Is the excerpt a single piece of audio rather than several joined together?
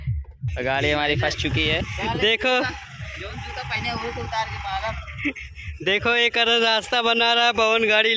no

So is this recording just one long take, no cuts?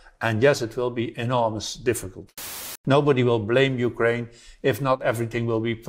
no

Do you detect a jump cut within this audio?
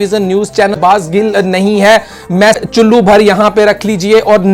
yes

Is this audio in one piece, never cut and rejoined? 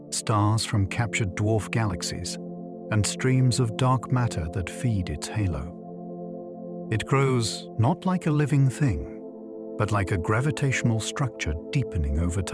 no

